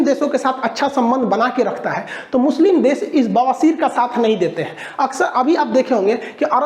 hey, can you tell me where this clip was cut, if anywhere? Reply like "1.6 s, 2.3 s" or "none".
none